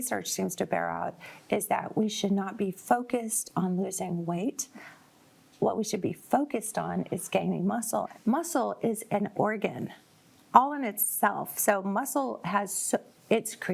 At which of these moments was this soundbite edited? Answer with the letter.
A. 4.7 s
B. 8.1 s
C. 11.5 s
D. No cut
B